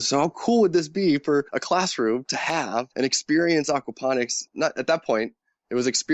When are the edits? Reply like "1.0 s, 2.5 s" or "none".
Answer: 1.6 s, 2.9 s, 4.4 s